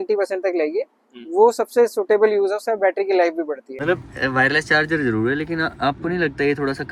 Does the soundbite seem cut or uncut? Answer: cut